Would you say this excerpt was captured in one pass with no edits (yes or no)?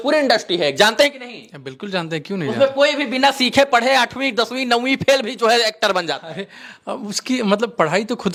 yes